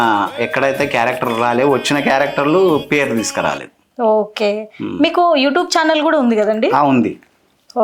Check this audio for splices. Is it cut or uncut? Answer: uncut